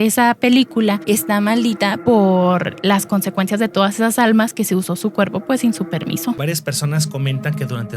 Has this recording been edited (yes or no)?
yes